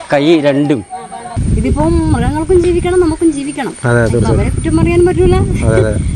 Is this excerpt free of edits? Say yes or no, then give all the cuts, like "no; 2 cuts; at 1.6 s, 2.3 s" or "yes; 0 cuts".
no; 1 cut; at 1.3 s